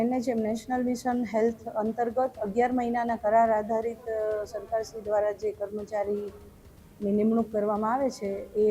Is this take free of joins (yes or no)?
yes